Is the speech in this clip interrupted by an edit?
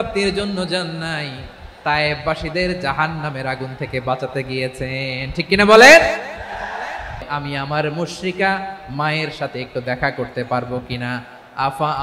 yes; 1 cut; at 7.2 s

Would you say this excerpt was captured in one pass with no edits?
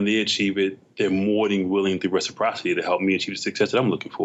yes; 0 cuts

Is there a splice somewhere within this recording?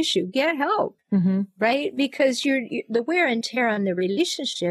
no; 0 cuts

